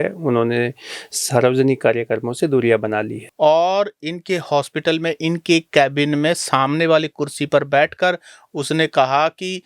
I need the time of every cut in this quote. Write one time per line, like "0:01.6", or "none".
0:03.2